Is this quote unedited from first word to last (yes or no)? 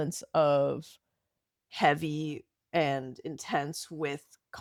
yes